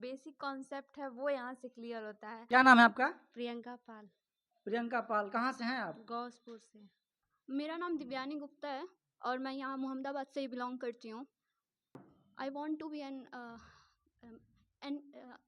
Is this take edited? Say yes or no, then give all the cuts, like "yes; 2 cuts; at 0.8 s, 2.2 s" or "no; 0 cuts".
yes; 3 cuts; at 2.3 s, 7.1 s, 12.2 s